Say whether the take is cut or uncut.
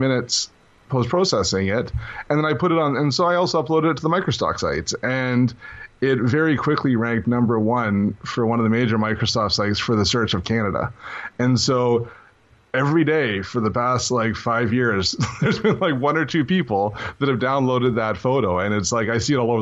cut